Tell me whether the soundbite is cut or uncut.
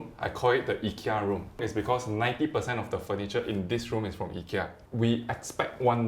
cut